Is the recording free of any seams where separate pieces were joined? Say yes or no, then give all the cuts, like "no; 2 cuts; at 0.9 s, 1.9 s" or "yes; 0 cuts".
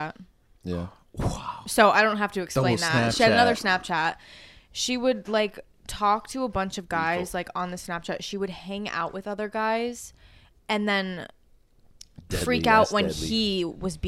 yes; 0 cuts